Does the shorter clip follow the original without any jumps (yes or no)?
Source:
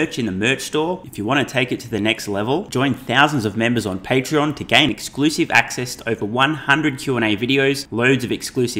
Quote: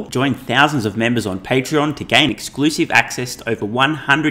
yes